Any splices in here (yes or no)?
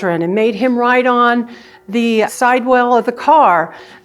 yes